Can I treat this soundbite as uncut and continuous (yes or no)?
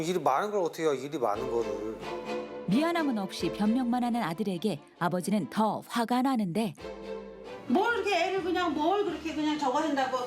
no